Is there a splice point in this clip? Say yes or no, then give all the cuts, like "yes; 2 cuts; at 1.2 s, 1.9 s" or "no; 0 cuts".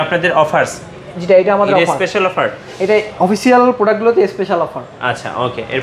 no; 0 cuts